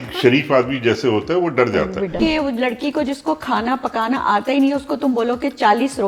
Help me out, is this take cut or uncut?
cut